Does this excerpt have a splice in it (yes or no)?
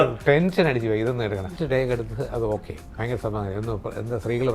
yes